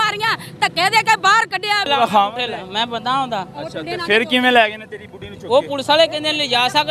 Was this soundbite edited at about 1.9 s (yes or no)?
yes